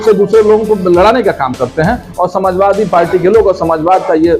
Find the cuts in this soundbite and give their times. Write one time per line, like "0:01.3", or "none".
none